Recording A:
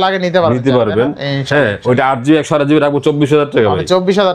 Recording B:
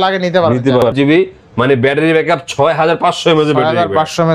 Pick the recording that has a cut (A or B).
B